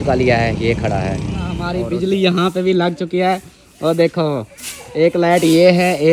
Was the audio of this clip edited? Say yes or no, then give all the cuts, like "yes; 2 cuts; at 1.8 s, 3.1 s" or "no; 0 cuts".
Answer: yes; 1 cut; at 1.7 s